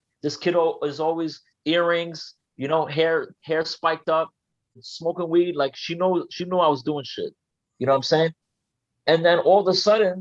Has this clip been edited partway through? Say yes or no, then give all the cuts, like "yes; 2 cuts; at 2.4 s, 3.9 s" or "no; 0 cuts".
yes; 1 cut; at 4.9 s